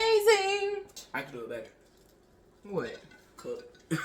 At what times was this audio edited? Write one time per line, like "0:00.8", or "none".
0:00.9

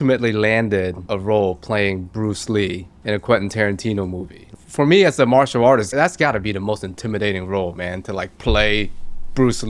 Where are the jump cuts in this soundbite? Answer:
0:01.0
0:02.9
0:04.5
0:05.9

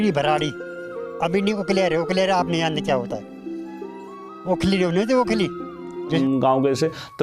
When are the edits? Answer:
0:06.2

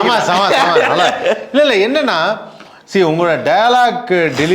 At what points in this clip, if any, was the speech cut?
none

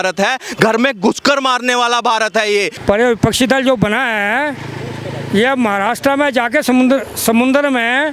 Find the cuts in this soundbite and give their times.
0:02.7

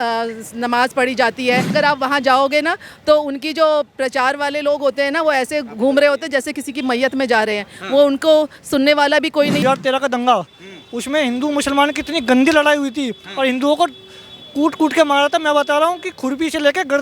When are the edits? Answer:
0:01.7
0:09.6

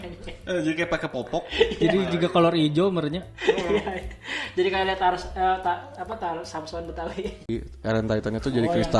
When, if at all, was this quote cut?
0:07.7

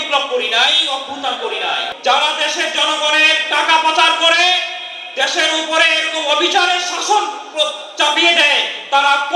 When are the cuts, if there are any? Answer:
0:01.8

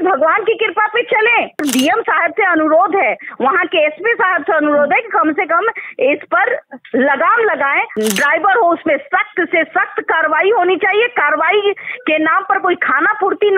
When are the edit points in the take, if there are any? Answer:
0:01.6
0:07.9

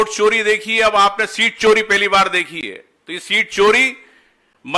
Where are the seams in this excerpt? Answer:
none

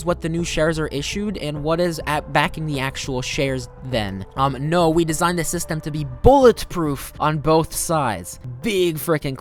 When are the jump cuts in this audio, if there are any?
none

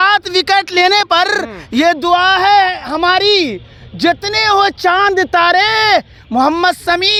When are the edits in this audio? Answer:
none

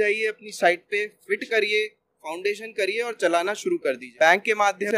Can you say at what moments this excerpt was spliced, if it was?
0:04.1

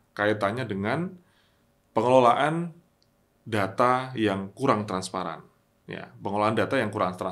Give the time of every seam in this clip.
none

